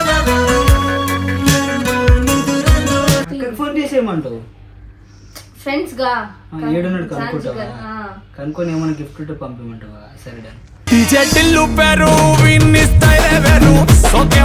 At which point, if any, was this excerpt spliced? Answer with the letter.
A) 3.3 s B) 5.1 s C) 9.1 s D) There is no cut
A